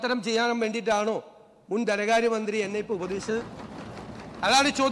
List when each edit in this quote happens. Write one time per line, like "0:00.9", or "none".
none